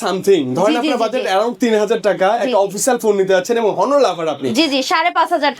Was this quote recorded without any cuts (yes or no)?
no